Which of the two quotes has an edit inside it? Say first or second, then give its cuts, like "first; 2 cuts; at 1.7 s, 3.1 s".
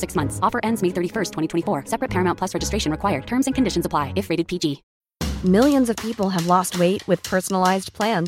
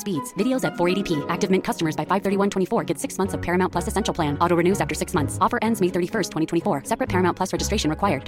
first; 1 cut; at 4.9 s